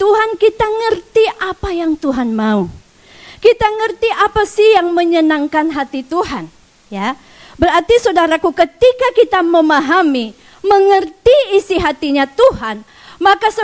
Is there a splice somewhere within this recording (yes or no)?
no